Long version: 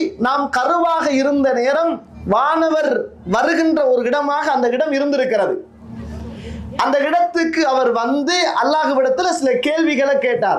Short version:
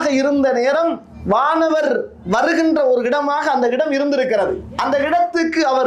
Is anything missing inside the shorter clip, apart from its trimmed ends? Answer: yes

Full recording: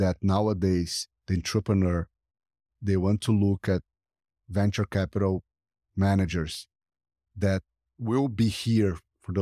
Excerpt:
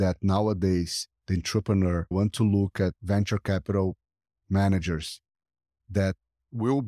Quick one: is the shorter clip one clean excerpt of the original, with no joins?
no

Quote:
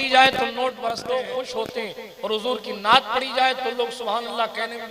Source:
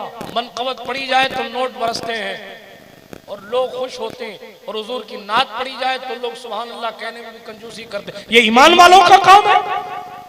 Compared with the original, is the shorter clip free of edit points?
no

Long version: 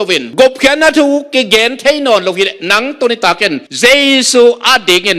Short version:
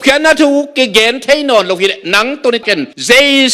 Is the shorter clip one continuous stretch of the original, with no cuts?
no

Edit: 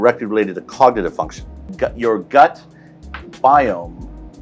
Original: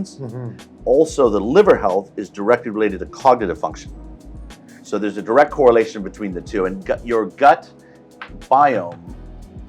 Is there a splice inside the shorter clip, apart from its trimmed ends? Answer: yes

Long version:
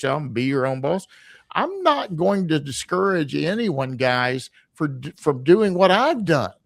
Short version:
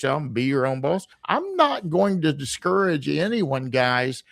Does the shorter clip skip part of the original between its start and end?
yes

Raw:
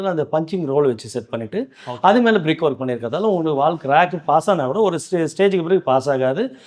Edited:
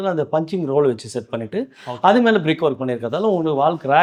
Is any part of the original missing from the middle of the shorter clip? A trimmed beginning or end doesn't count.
no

